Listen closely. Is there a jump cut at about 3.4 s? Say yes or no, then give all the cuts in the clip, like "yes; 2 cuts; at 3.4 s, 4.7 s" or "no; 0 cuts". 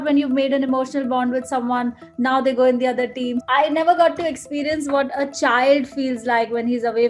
yes; 1 cut; at 3.4 s